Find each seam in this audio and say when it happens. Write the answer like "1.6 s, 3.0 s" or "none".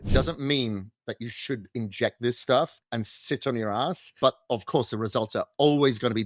2.8 s, 4.2 s